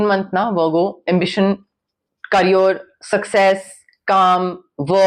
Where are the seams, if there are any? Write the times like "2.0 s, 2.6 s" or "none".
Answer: none